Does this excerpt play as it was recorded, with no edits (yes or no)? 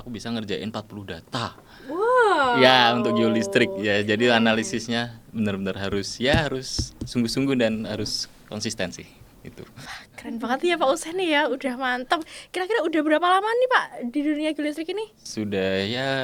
yes